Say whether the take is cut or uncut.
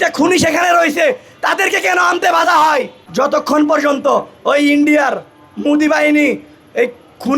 cut